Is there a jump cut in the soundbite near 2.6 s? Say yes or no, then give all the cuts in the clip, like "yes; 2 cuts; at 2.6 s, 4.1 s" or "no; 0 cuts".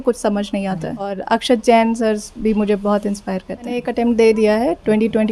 no; 2 cuts; at 1.2 s, 3.9 s